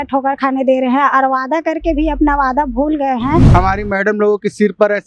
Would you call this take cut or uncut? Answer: cut